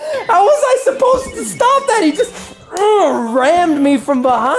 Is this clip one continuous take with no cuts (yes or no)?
yes